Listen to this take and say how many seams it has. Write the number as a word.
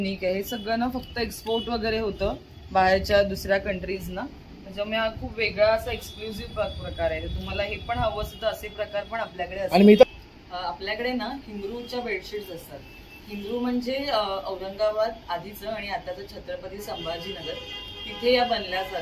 one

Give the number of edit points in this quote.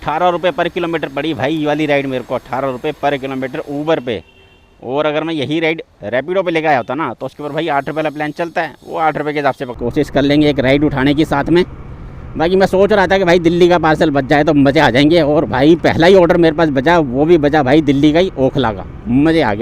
one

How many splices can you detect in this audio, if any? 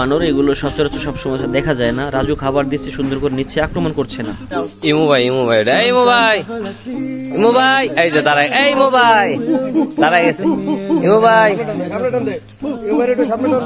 one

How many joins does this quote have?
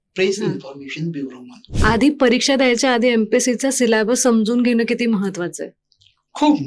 one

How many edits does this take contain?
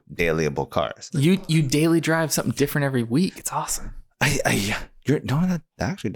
one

